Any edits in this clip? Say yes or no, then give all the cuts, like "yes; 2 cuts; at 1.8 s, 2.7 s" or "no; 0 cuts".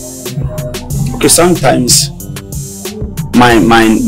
no; 0 cuts